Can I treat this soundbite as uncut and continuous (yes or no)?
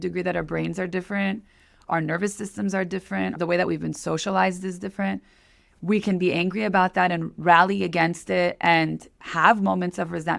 no